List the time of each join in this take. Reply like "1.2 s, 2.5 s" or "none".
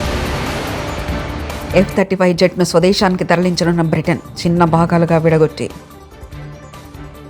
1.6 s